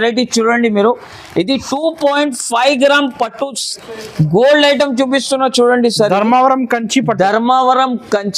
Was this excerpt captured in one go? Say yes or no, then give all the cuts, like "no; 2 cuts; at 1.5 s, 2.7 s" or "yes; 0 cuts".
yes; 0 cuts